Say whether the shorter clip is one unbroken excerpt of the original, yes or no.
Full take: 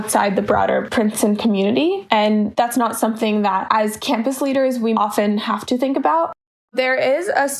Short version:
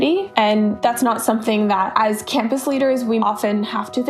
yes